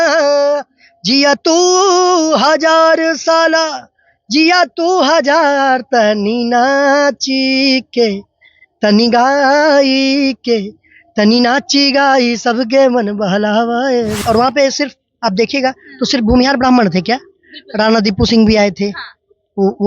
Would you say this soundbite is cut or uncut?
cut